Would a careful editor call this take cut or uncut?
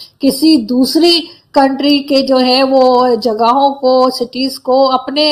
uncut